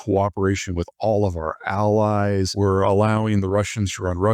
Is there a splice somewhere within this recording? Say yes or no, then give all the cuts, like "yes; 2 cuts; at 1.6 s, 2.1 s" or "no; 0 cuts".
yes; 1 cut; at 2.5 s